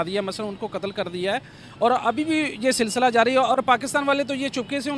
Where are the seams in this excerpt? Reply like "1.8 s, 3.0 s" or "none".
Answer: none